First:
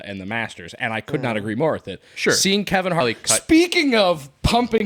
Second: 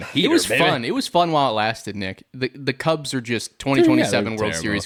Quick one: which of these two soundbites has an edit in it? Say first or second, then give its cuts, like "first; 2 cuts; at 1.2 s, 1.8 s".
first; 1 cut; at 3.0 s